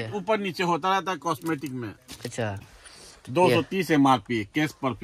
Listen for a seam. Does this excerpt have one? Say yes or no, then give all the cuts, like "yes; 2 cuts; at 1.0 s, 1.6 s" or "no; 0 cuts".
yes; 1 cut; at 2.6 s